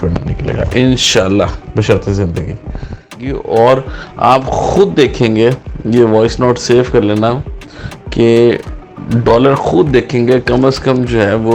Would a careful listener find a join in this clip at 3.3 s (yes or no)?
yes